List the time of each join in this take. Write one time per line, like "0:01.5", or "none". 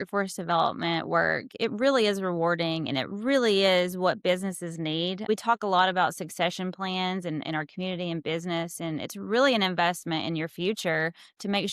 0:05.3